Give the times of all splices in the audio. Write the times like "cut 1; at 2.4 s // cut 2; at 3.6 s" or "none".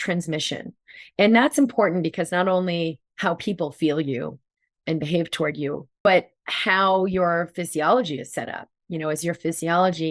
cut 1; at 5.9 s